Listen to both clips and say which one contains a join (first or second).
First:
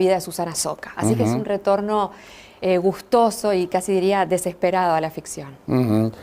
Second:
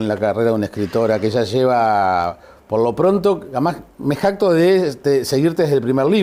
first